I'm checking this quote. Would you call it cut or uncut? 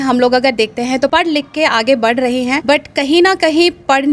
cut